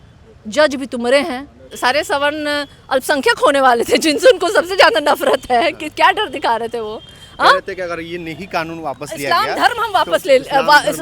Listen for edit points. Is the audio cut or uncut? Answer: cut